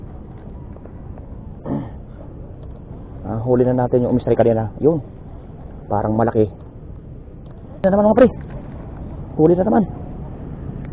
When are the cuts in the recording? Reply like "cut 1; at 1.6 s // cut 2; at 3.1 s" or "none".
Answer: cut 1; at 7.8 s